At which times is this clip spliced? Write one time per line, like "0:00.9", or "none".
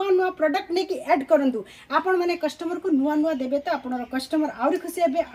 none